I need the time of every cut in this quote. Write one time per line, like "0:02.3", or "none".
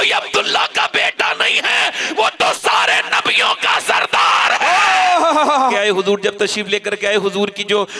0:05.7